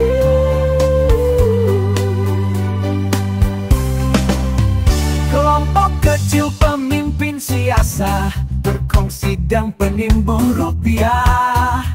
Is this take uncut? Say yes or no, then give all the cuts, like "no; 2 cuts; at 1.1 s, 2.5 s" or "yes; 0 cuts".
yes; 0 cuts